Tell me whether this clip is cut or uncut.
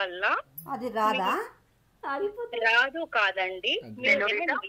uncut